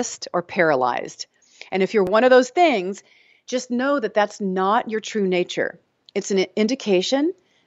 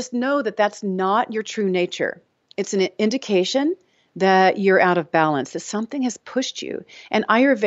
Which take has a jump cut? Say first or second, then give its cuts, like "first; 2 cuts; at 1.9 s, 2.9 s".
first; 1 cut; at 2.1 s